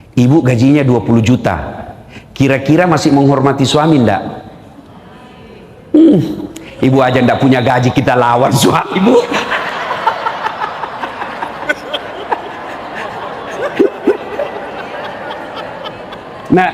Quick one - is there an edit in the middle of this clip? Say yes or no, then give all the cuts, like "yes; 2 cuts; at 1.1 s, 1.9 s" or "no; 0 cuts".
no; 0 cuts